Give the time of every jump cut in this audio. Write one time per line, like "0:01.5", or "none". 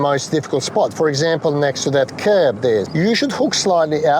0:02.9